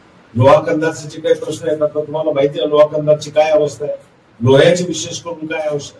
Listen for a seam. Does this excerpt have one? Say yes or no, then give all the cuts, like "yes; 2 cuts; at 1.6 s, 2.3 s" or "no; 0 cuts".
no; 0 cuts